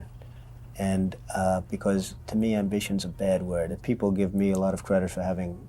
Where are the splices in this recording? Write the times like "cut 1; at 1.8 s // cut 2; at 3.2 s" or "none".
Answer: cut 1; at 3.8 s